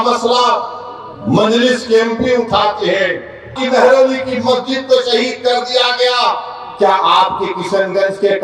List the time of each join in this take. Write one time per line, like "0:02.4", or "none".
0:03.6